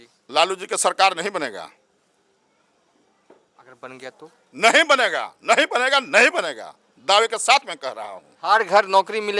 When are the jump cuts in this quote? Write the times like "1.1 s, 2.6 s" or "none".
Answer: none